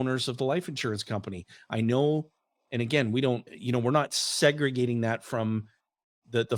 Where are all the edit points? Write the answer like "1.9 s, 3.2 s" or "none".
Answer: none